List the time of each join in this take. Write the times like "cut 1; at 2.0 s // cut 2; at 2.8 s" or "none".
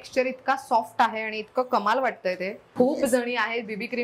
cut 1; at 2.6 s